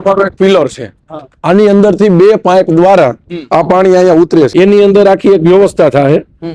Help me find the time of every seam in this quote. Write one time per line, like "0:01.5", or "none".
0:04.5